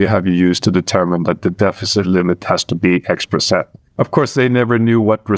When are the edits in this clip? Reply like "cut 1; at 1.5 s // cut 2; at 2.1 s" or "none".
none